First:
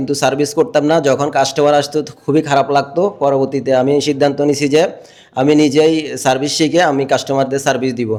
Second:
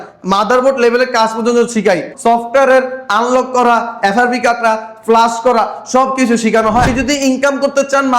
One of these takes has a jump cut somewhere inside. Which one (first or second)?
second